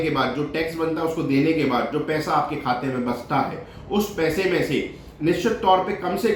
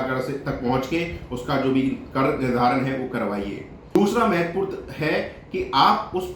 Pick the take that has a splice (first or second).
second